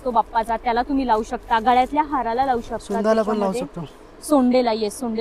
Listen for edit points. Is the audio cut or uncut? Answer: uncut